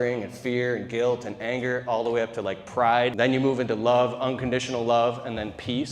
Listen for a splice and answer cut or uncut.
cut